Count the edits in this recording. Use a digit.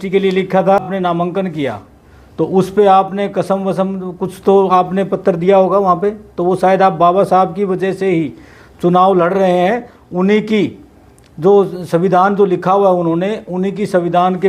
1